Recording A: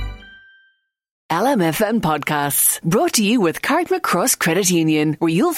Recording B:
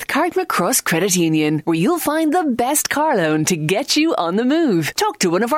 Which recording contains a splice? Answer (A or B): A